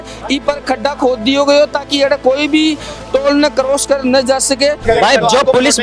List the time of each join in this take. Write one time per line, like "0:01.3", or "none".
0:04.8